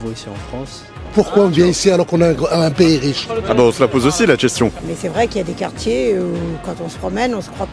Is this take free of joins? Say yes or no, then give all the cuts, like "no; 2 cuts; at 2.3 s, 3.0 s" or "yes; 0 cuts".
no; 2 cuts; at 1.0 s, 4.8 s